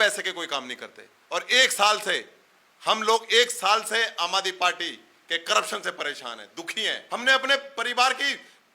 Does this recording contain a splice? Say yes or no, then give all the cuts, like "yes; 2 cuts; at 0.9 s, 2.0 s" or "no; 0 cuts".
yes; 1 cut; at 7.0 s